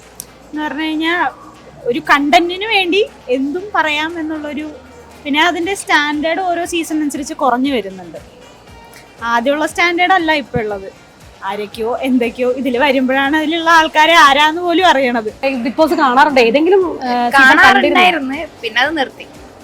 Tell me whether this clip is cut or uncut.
cut